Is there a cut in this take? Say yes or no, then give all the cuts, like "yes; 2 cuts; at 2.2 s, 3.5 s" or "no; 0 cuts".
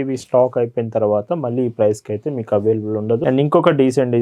yes; 1 cut; at 3.2 s